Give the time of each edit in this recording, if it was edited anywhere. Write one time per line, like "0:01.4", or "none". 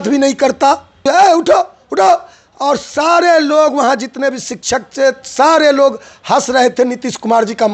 0:01.0

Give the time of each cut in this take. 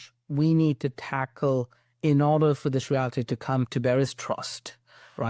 0:03.7

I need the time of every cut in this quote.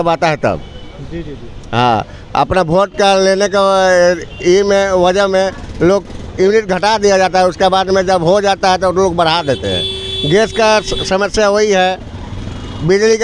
none

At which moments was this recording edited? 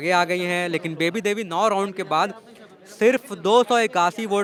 none

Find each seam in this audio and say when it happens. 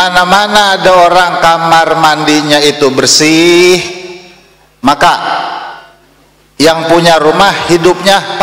none

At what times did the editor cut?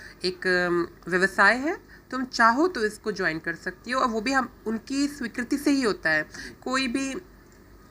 none

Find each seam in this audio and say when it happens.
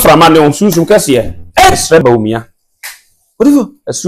0:02.0

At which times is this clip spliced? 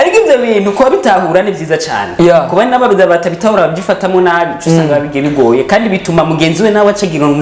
none

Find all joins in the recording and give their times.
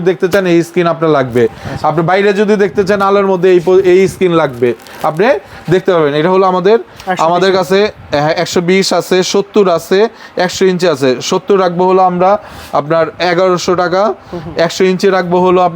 none

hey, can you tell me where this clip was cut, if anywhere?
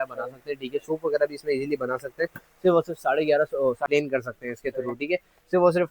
0:03.9

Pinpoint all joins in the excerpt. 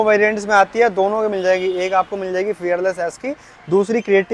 none

